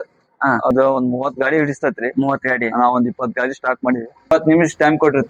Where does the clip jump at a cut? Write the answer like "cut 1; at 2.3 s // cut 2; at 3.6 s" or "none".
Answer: cut 1; at 0.7 s // cut 2; at 4.3 s

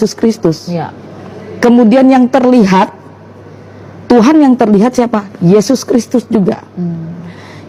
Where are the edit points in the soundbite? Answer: none

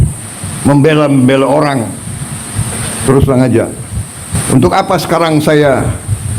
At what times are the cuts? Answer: cut 1; at 4.3 s

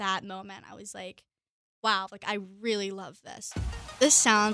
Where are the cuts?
cut 1; at 3.6 s

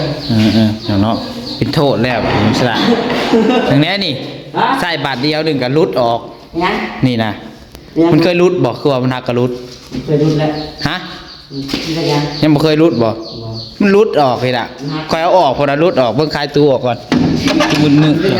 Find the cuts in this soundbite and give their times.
none

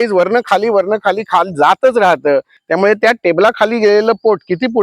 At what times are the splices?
cut 1; at 2.6 s

